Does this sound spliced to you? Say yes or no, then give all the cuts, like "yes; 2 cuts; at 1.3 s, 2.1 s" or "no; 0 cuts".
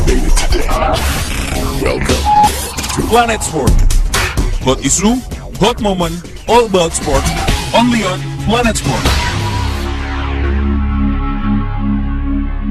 no; 0 cuts